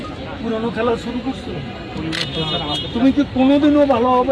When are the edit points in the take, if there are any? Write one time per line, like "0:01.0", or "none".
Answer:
none